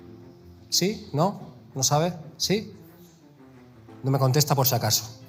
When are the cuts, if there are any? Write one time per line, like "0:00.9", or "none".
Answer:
none